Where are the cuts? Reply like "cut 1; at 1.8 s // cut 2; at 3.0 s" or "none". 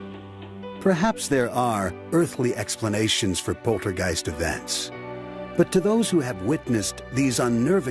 cut 1; at 1.6 s